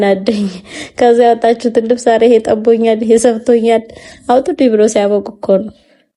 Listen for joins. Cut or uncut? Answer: uncut